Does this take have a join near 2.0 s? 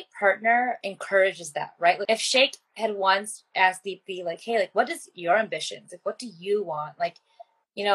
yes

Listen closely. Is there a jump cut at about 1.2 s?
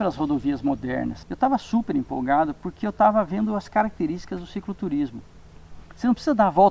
yes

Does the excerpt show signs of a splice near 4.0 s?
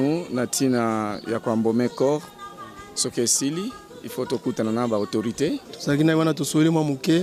no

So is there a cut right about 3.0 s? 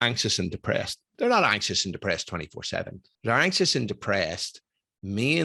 yes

